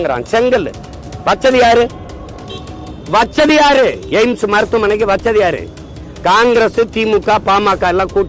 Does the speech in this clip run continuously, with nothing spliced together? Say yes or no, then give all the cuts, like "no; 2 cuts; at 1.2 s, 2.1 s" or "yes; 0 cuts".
yes; 0 cuts